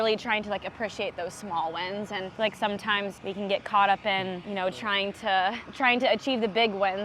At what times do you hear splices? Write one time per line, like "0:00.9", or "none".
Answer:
0:02.3
0:03.2
0:04.4
0:05.7